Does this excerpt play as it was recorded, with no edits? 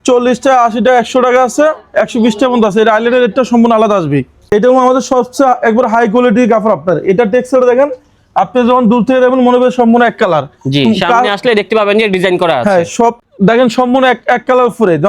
no; 2 cuts; at 4.3 s, 13.2 s

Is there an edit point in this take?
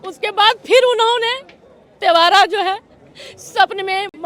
no; 0 cuts

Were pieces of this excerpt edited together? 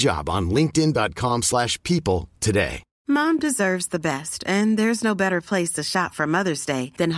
yes; 1 cut; at 2.9 s

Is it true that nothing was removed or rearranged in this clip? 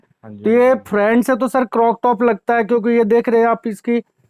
yes; 0 cuts

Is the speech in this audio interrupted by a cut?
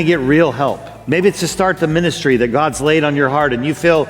yes; 1 cut; at 0.9 s

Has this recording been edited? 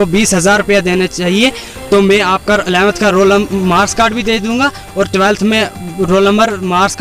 no; 0 cuts

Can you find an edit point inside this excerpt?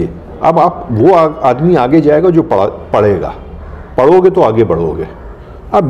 no; 0 cuts

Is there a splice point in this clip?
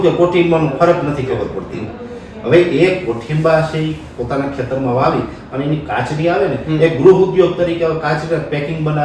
no; 0 cuts

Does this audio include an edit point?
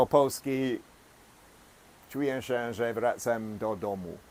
no; 0 cuts

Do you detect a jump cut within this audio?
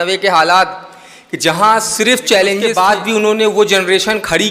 yes; 1 cut; at 2.7 s

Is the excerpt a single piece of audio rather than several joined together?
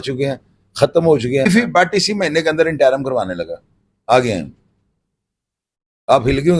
no; 1 cut; at 1.5 s

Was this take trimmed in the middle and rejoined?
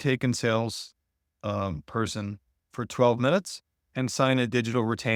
no; 0 cuts

